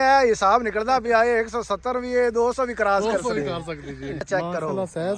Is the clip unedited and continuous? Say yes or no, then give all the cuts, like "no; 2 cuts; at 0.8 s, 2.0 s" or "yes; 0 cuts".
no; 1 cut; at 4.2 s